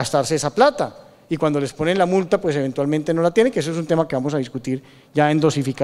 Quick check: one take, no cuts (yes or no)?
no